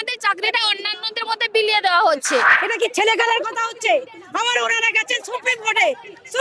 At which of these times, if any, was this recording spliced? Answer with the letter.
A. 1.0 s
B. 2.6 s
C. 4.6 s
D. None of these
B